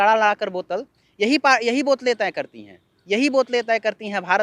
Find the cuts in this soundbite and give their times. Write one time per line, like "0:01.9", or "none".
none